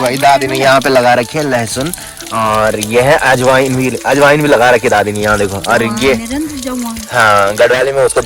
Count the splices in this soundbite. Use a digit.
0